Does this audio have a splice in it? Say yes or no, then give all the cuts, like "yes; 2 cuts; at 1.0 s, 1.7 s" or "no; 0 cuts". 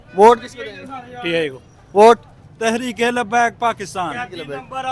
no; 0 cuts